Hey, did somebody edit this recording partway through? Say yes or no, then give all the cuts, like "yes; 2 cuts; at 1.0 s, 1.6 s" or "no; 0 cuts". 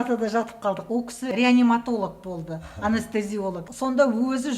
yes; 2 cuts; at 1.3 s, 3.7 s